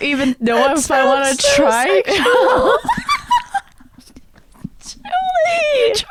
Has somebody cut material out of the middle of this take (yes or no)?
no